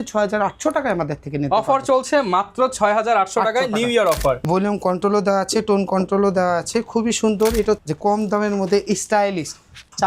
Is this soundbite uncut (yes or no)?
no